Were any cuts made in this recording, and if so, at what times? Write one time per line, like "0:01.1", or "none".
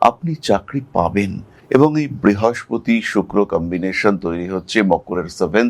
0:01.6